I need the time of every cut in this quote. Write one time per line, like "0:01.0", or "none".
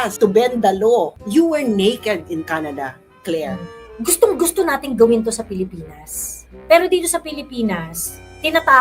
0:01.1
0:03.7